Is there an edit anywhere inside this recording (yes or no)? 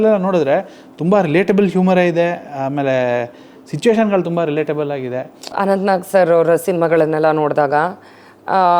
yes